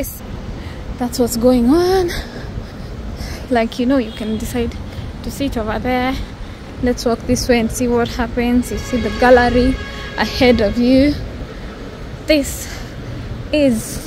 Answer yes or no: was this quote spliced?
no